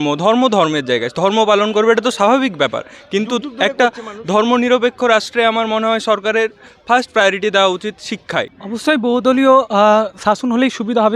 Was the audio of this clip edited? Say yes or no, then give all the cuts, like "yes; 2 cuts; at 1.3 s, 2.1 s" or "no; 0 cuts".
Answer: yes; 1 cut; at 8.5 s